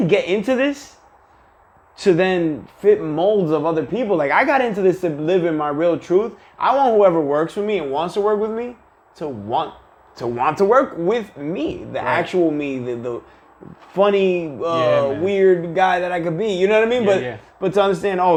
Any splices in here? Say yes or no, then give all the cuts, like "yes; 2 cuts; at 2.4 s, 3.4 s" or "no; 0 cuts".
no; 0 cuts